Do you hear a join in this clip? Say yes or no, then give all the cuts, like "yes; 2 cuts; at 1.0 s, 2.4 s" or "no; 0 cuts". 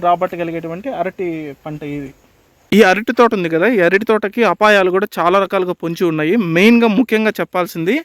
yes; 1 cut; at 2.5 s